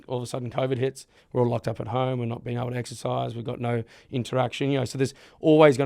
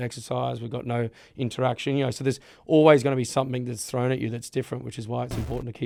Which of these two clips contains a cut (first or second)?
first